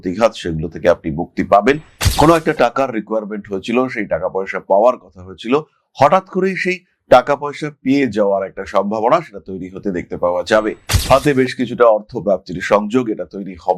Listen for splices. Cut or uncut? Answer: cut